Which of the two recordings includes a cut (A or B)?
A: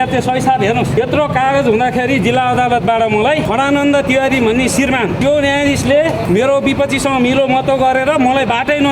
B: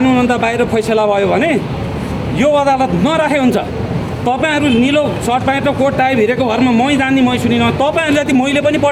A